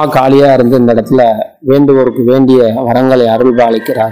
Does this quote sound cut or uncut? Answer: uncut